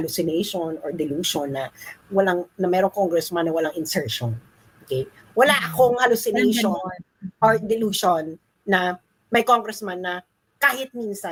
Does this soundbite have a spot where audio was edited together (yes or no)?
no